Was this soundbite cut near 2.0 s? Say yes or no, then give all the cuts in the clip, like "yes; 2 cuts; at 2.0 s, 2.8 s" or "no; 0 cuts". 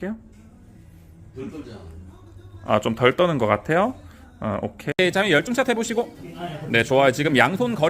no; 1 cut; at 4.9 s